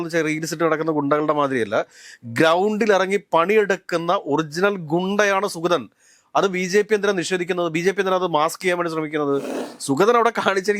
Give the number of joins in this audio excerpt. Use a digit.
1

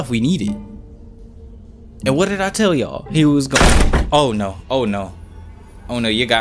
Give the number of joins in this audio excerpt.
0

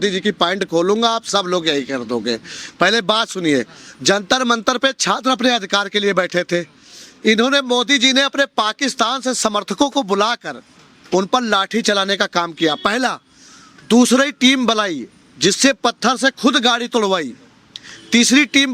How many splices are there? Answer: 0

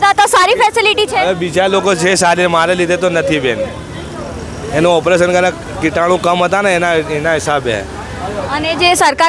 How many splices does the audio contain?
0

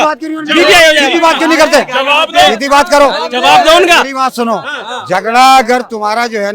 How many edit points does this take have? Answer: 0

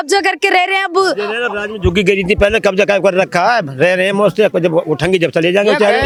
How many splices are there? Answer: 0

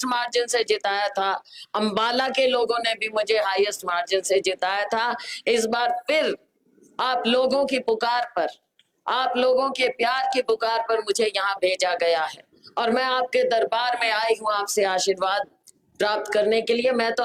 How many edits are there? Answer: 0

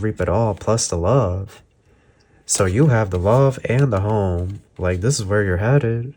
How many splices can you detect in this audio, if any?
0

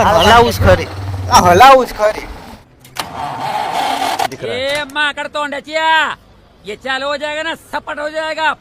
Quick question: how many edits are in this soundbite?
1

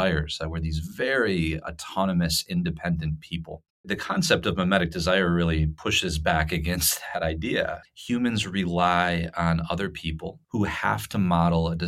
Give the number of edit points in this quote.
3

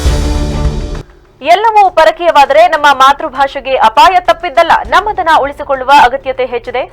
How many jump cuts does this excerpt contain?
1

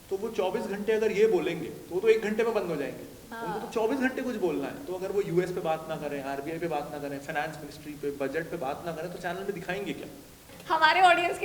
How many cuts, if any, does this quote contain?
1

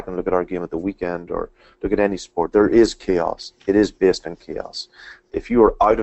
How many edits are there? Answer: 2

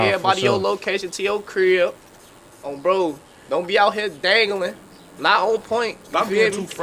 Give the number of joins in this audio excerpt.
0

